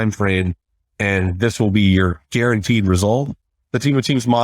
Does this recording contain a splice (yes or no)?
yes